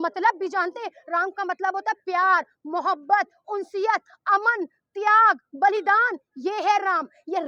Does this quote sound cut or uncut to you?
uncut